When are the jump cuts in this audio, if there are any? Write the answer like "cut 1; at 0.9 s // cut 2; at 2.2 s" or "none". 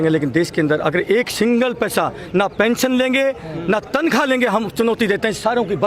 none